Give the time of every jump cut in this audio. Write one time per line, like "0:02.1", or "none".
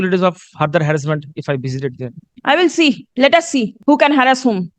0:02.2
0:03.1
0:03.8